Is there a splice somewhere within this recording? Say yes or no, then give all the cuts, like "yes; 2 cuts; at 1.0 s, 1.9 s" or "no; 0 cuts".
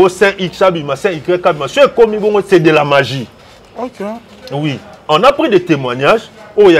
no; 0 cuts